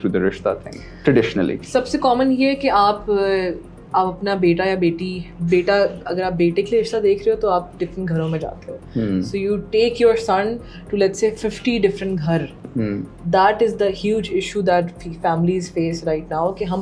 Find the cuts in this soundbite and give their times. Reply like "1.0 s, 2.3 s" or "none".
none